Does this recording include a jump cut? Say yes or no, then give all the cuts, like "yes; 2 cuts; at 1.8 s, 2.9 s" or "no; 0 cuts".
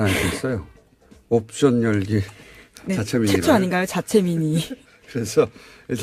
no; 0 cuts